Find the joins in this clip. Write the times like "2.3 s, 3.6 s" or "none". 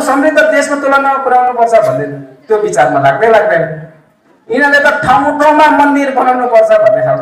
none